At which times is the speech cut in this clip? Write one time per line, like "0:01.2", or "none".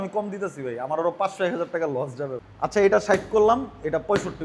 0:02.4